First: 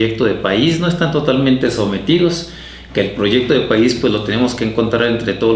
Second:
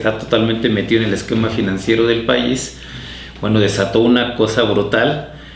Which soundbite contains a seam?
second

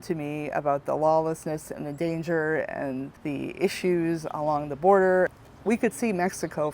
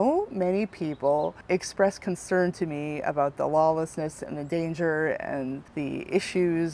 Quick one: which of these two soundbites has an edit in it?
first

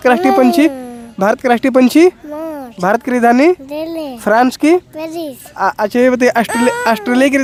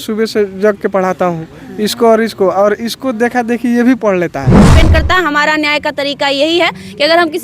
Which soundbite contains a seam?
second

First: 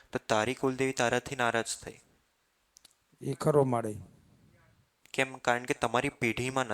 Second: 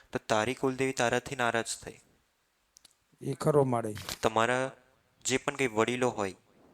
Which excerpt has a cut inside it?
second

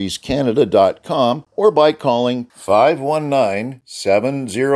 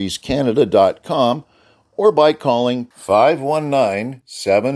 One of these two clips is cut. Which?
first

